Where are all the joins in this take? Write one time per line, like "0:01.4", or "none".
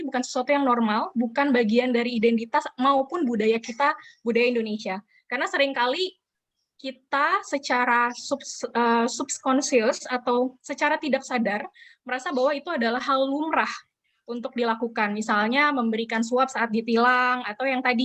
none